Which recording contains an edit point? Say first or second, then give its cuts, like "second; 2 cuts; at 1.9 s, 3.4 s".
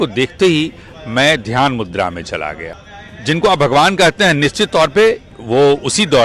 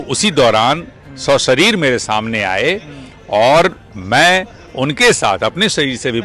first; 1 cut; at 2.7 s